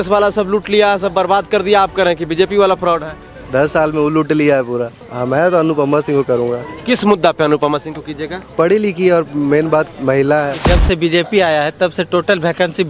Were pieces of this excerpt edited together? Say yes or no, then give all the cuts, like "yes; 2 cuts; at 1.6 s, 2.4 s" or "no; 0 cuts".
yes; 2 cuts; at 5.0 s, 10.6 s